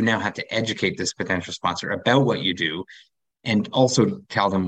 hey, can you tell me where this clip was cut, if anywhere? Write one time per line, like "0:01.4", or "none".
none